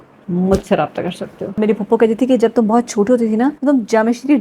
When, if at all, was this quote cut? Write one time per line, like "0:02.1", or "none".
0:01.6
0:03.6